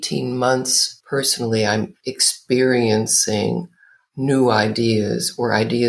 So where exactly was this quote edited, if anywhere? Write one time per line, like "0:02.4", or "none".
0:00.9